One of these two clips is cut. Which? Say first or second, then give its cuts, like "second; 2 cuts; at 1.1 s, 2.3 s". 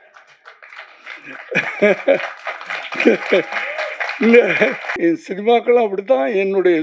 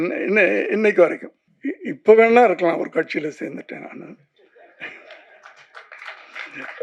first; 1 cut; at 4.8 s